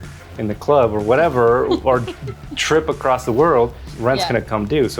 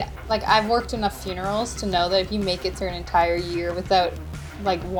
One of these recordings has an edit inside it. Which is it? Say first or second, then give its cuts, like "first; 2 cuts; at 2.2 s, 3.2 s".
first; 1 cut; at 3.9 s